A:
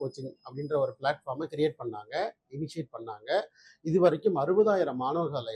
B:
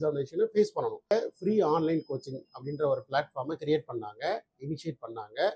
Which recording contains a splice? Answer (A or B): B